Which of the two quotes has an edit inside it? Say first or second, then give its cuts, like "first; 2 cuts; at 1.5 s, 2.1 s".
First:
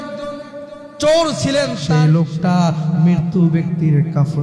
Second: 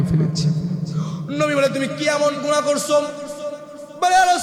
first; 1 cut; at 1.8 s